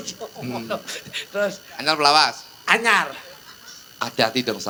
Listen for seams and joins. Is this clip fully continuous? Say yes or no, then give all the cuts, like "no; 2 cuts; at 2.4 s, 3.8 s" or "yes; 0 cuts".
yes; 0 cuts